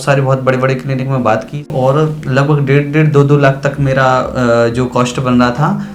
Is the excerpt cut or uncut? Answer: cut